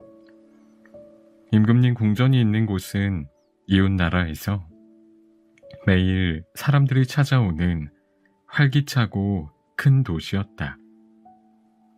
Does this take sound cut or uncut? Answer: uncut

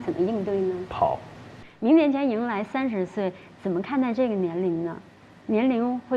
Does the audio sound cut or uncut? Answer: cut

